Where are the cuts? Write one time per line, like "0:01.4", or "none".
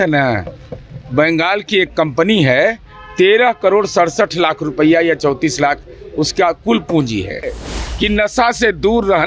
0:07.6

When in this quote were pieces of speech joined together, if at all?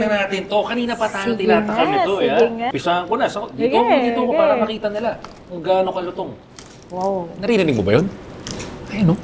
0:02.8

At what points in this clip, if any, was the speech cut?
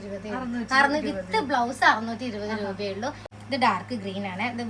none

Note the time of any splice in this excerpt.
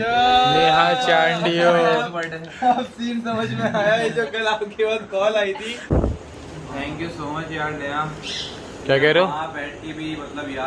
0:05.9

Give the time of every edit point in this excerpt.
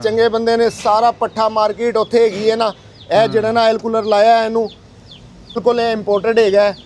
0:05.6

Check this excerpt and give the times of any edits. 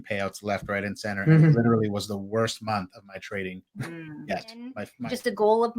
0:04.8

